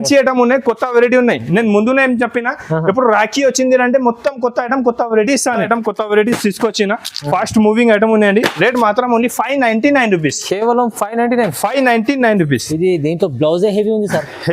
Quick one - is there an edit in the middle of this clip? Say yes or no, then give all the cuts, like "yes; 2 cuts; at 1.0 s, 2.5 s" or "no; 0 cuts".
yes; 1 cut; at 5.6 s